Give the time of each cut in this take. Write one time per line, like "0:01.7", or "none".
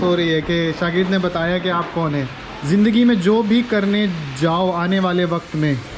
0:02.5